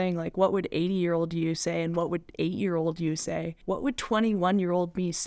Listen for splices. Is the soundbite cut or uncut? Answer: cut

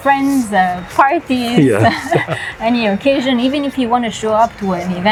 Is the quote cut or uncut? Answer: uncut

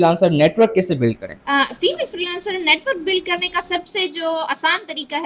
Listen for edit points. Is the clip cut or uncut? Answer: cut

